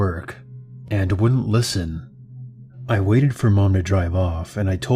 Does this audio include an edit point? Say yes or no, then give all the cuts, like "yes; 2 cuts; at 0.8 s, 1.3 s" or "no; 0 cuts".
no; 0 cuts